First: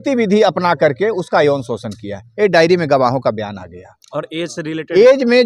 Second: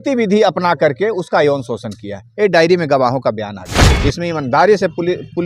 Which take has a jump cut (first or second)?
second